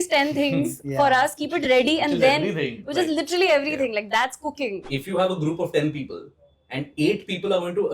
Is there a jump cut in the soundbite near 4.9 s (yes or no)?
yes